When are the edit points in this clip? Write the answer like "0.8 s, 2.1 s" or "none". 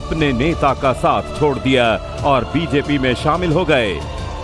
none